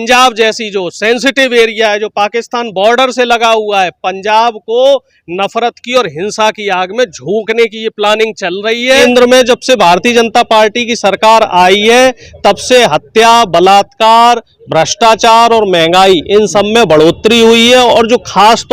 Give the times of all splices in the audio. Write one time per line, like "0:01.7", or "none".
0:09.0

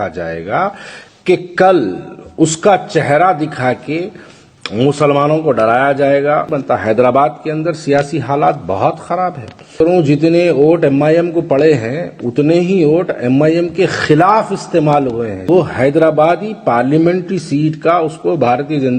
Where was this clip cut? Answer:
0:06.5
0:09.8
0:15.4

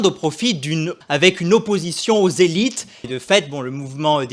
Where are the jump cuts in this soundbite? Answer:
0:00.9
0:03.1

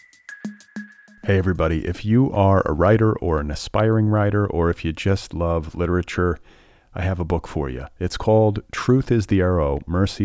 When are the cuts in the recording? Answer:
0:00.9

